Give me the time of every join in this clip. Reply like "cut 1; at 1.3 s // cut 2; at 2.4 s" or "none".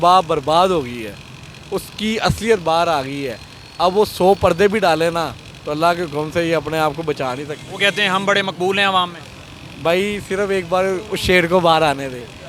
none